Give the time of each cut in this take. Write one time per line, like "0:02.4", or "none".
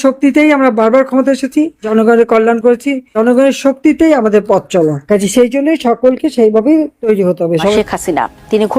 0:07.8